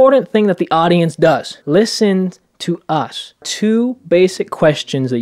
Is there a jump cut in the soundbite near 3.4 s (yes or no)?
yes